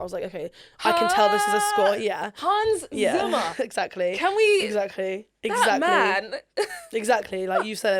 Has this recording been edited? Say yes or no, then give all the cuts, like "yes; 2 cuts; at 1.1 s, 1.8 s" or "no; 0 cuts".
no; 0 cuts